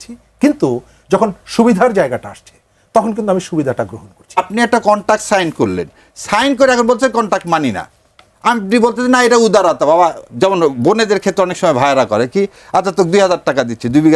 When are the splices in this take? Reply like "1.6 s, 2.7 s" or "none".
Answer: 4.4 s